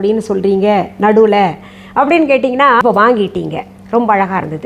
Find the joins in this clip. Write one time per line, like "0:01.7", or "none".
0:02.8